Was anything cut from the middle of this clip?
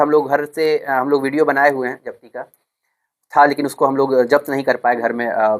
no; 0 cuts

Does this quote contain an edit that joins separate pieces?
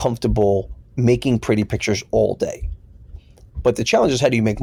no; 0 cuts

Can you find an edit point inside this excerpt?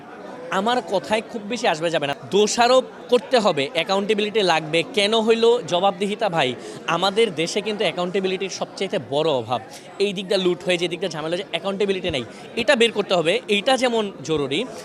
yes; 1 cut; at 2.1 s

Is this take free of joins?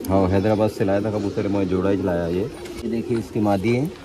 yes; 0 cuts

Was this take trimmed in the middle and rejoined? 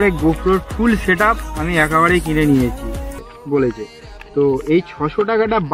yes; 1 cut; at 3.3 s

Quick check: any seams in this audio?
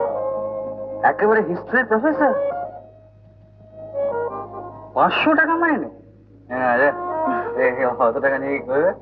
no; 0 cuts

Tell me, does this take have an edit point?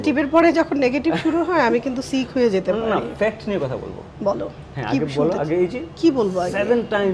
no; 0 cuts

